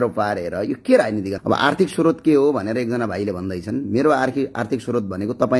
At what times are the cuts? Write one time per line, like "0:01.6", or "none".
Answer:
0:01.4